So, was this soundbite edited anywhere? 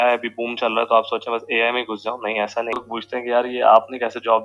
yes; 1 cut; at 2.8 s

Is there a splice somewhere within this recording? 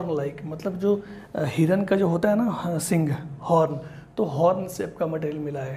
no; 0 cuts

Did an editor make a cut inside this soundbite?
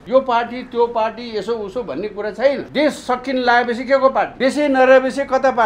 yes; 2 cuts; at 2.7 s, 4.3 s

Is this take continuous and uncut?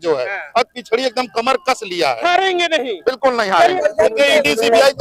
no; 1 cut; at 3.8 s

